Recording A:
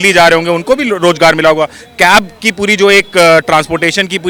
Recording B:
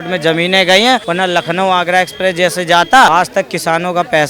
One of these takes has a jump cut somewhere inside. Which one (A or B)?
B